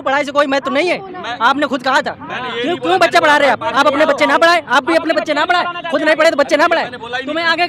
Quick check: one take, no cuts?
yes; 0 cuts

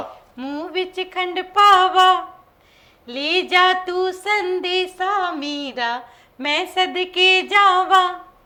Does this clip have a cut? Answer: no; 0 cuts

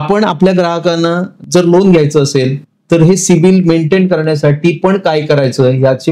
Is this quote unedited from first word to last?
yes; 0 cuts

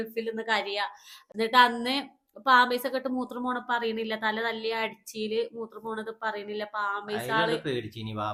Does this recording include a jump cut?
no; 0 cuts

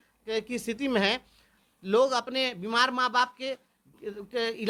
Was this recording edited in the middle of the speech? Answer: no; 0 cuts

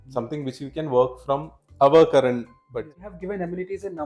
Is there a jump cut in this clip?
yes; 1 cut; at 3.1 s

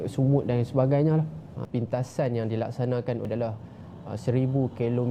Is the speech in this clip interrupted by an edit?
yes; 2 cuts; at 1.6 s, 3.3 s

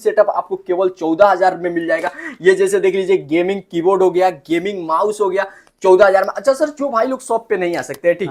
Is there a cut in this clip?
no; 0 cuts

